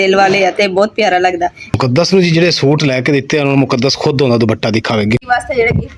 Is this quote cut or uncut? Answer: cut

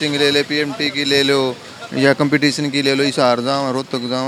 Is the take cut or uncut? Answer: uncut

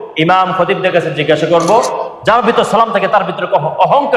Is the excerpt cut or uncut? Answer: cut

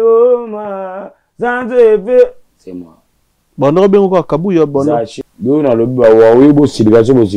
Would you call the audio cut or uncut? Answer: cut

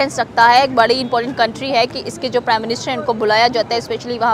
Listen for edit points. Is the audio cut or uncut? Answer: uncut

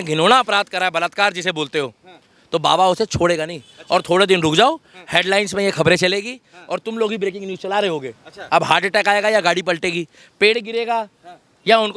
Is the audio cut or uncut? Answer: uncut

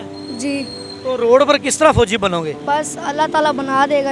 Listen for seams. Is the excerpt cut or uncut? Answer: cut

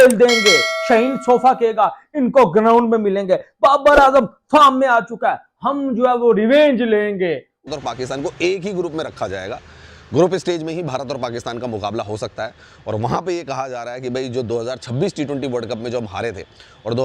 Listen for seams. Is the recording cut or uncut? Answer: cut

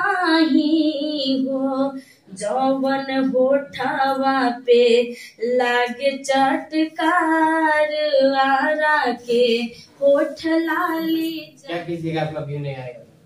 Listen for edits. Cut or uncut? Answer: cut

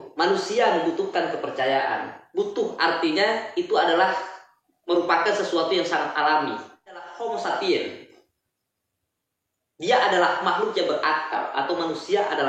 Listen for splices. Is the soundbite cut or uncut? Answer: cut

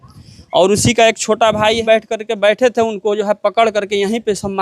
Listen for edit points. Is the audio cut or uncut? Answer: cut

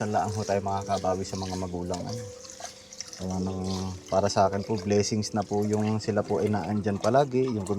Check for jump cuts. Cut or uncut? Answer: uncut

